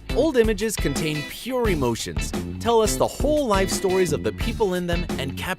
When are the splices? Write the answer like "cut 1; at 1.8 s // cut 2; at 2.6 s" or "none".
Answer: cut 1; at 3.1 s